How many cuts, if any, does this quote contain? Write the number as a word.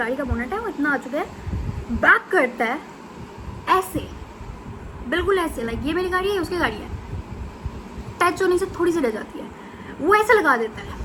zero